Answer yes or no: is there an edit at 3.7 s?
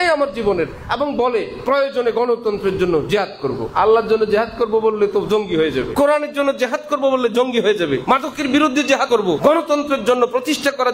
yes